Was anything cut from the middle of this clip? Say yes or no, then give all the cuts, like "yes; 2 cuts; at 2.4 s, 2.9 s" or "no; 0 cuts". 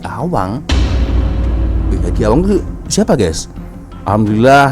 no; 0 cuts